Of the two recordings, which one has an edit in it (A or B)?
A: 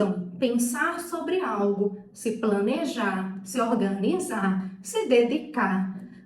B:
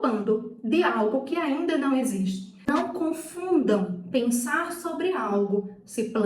B